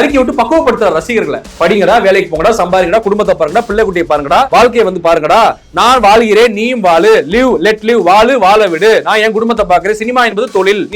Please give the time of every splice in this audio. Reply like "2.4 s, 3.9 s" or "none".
4.5 s